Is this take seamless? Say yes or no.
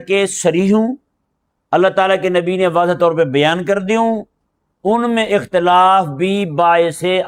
yes